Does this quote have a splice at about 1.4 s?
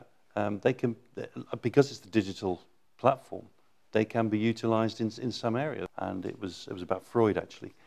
no; 1 cut; at 5.9 s

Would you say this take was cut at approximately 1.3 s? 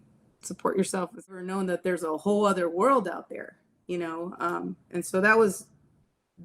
yes; 1 cut; at 1.3 s

